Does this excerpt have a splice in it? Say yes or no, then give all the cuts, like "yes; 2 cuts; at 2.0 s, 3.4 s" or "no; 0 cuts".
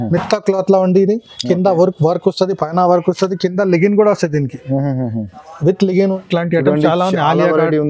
yes; 1 cut; at 6.2 s